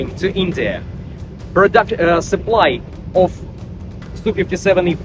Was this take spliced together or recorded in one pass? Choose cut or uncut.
uncut